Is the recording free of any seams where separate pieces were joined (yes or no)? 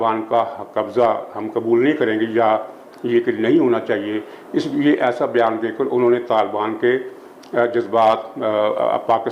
yes